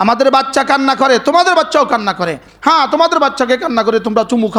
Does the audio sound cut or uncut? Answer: uncut